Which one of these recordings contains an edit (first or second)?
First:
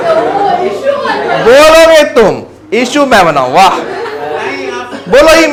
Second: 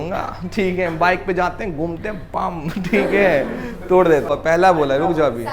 second